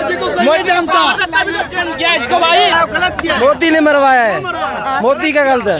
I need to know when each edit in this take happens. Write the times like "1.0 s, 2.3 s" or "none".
2.7 s